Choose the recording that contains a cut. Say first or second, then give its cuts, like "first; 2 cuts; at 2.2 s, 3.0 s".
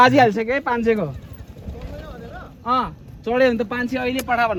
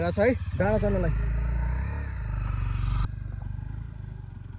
second; 1 cut; at 3.1 s